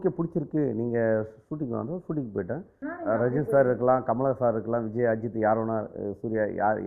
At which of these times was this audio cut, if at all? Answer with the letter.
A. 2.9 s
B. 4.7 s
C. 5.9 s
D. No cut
A